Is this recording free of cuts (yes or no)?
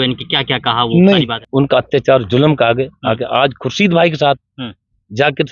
no